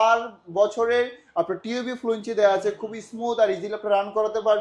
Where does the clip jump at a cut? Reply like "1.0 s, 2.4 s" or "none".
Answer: none